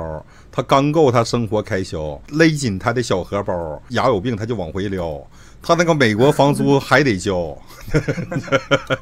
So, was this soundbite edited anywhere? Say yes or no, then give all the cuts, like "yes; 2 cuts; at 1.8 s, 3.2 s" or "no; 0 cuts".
yes; 2 cuts; at 2.2 s, 3.9 s